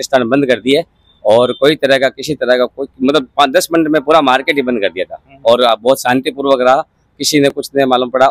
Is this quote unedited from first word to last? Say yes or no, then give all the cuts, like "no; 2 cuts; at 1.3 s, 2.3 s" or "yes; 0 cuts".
yes; 0 cuts